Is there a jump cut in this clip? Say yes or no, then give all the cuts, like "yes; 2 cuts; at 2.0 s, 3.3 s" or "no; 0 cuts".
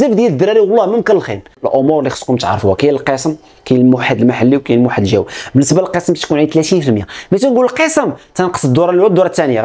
yes; 1 cut; at 1.6 s